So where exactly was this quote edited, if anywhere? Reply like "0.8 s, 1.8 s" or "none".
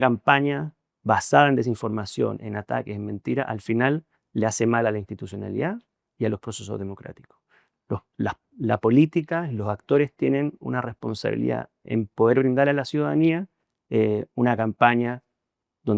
none